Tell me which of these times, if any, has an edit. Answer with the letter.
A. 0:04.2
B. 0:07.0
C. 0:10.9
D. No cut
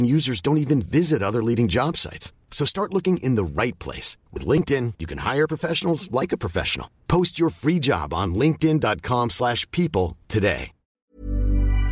C